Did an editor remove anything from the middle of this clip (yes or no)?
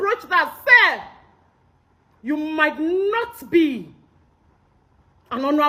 no